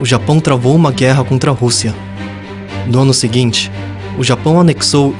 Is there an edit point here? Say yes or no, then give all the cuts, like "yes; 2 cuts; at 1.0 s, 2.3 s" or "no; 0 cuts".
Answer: no; 0 cuts